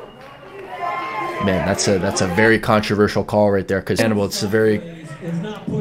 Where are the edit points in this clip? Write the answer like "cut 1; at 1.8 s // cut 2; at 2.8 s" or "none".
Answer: cut 1; at 4.0 s